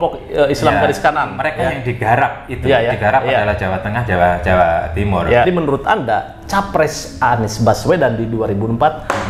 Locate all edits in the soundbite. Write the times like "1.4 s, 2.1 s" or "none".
5.4 s